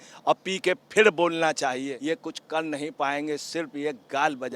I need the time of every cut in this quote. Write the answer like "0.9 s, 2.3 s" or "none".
1.9 s